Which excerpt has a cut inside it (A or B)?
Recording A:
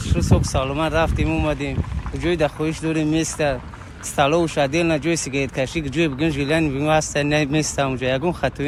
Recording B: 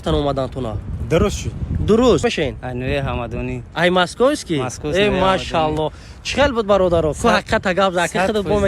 B